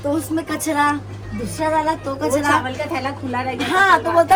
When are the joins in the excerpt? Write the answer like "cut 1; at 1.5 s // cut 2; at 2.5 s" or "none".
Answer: none